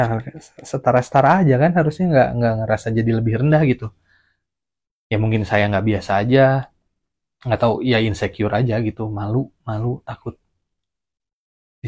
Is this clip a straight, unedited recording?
yes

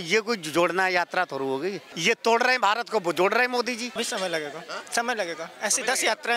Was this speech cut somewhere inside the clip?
yes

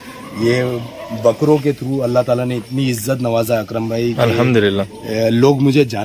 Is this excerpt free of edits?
yes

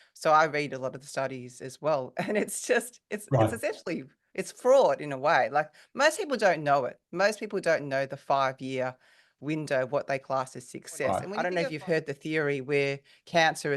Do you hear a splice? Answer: yes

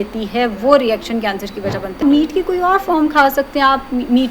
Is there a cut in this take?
yes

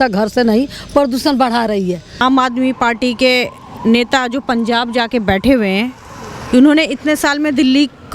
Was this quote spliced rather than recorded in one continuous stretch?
yes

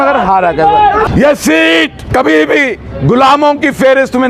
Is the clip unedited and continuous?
no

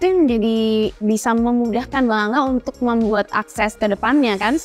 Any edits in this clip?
yes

